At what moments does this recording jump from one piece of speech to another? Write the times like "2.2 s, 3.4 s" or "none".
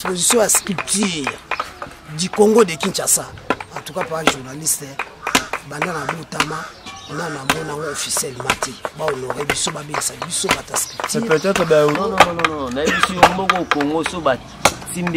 12.0 s